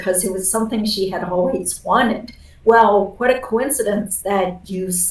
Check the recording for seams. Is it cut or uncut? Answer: uncut